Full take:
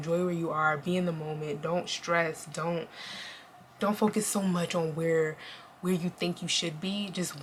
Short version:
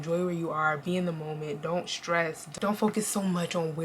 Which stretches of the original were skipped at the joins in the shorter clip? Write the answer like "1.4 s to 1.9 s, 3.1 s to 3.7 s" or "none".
2.5 s to 3.7 s